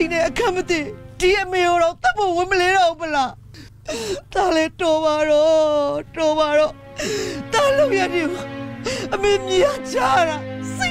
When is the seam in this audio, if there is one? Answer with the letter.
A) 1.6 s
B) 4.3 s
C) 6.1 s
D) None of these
D